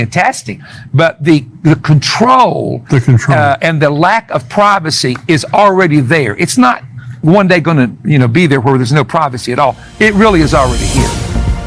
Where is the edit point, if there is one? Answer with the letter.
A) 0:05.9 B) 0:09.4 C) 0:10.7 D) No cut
C